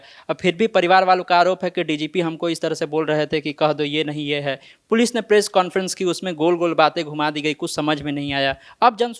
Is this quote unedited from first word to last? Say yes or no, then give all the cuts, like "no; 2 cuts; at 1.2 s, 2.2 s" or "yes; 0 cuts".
yes; 0 cuts